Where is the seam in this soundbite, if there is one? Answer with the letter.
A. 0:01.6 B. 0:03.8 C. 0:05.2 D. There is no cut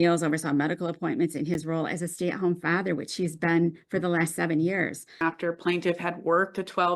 C